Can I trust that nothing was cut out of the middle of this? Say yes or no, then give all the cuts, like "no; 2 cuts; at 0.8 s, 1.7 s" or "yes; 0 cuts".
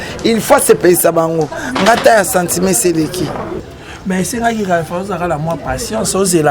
no; 1 cut; at 3.6 s